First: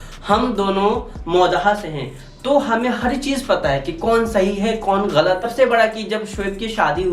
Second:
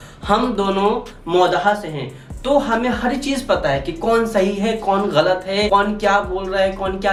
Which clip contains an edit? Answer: first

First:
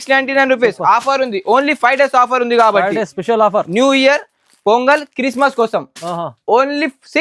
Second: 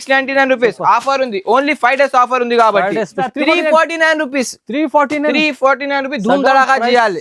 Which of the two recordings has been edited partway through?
second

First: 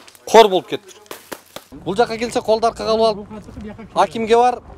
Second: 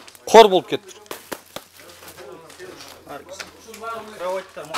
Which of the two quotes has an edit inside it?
first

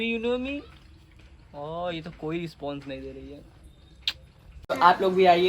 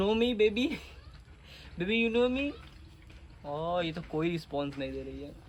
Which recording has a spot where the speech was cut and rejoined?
first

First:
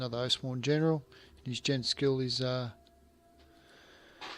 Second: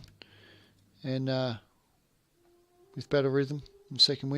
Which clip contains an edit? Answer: second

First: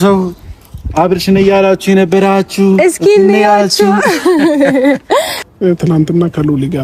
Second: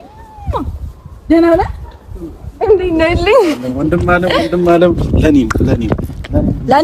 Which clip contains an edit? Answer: first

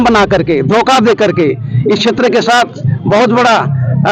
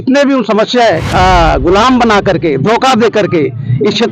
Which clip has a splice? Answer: second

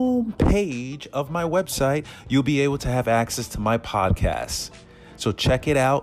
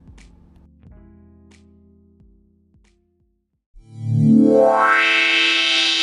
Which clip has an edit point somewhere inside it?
second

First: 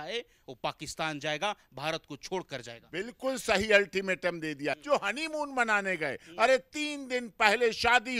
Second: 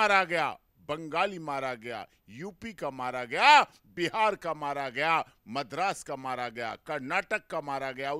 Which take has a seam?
first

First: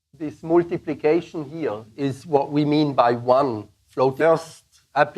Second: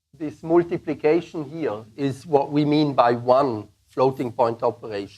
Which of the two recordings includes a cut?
second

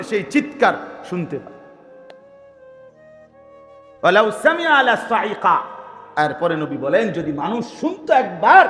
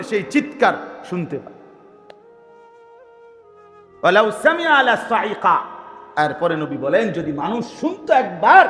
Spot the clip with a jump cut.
first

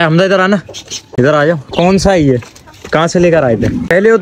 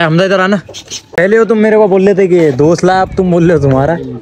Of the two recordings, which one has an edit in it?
second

